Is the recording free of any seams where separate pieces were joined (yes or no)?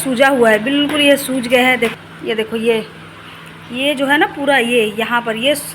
no